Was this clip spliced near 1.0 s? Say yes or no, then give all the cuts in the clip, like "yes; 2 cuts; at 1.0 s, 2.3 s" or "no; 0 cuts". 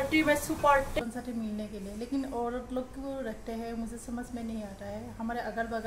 yes; 1 cut; at 1.0 s